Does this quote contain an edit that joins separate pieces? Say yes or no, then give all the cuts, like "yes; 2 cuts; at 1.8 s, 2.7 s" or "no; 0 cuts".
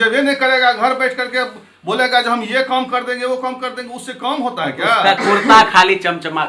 no; 0 cuts